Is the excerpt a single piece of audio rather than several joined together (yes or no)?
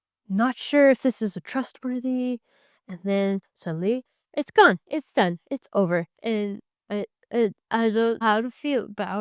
no